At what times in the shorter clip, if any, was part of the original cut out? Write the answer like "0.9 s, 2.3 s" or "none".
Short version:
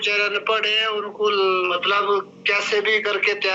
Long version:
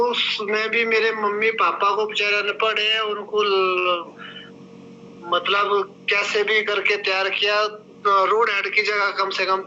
1.7 s